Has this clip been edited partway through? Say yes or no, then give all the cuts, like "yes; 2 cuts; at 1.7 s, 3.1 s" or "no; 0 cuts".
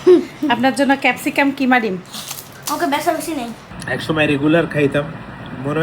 yes; 1 cut; at 3.7 s